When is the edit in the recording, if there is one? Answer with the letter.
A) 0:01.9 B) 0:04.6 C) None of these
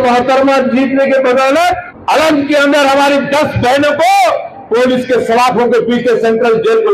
A